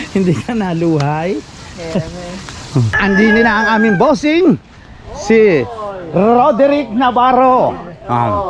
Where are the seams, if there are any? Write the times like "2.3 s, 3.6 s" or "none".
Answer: 2.9 s